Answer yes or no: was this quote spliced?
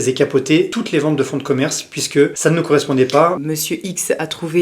yes